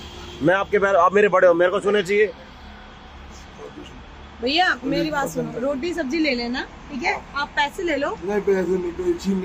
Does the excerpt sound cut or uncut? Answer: uncut